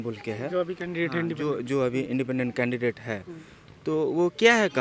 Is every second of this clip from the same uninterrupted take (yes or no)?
yes